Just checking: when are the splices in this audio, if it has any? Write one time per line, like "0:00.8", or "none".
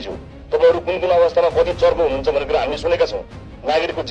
none